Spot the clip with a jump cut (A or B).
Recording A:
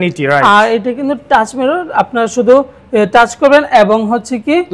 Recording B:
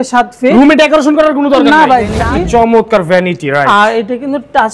B